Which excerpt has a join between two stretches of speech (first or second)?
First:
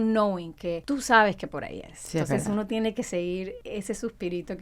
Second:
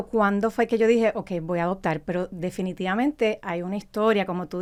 first